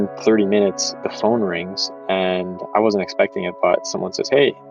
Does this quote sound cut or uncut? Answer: uncut